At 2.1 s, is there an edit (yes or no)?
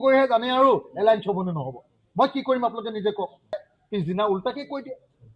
no